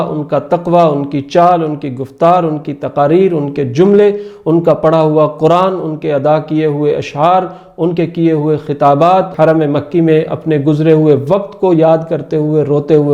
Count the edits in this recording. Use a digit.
1